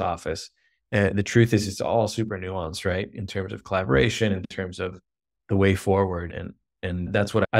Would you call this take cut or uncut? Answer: uncut